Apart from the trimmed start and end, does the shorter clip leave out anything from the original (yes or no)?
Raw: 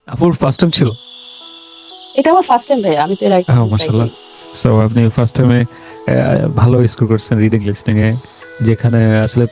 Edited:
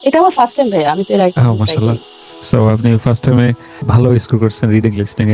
yes